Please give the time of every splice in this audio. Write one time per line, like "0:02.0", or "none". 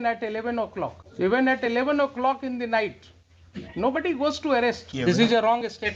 0:01.0
0:04.9

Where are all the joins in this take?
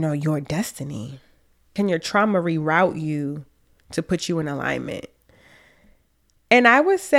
0:01.7

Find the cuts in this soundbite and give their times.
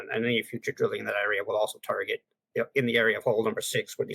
0:02.3

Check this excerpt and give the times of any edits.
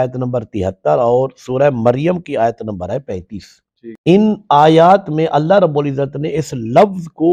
none

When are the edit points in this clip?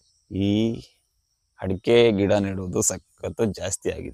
none

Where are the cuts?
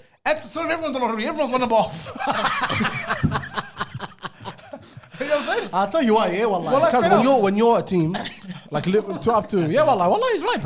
none

